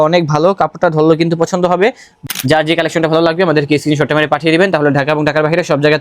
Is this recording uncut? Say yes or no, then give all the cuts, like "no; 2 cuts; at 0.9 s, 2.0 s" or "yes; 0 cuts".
no; 1 cut; at 2.2 s